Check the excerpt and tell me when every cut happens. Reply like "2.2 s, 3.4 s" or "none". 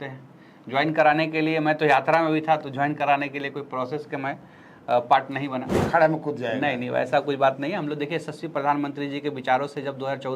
5.9 s